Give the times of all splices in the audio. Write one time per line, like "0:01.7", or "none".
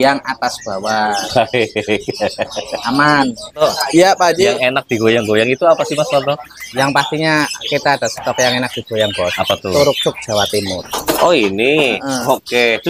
0:03.6
0:10.8